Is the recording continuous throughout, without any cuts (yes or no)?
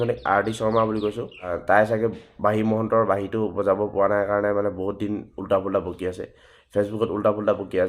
no